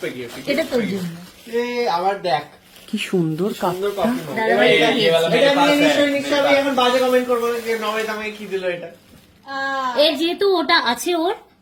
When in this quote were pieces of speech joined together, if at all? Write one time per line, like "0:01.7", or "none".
none

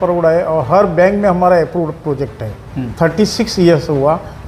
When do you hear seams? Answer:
0:02.8

